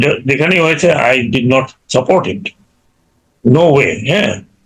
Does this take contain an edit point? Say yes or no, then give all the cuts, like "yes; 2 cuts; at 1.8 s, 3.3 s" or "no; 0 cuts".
no; 0 cuts